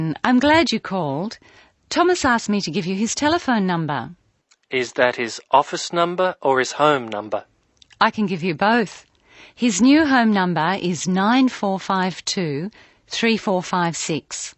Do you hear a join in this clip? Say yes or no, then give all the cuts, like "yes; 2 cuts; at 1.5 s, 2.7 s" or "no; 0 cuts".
no; 0 cuts